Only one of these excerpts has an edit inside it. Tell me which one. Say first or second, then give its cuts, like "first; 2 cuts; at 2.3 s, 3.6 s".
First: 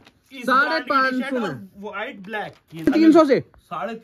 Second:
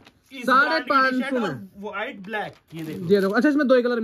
first; 1 cut; at 2.9 s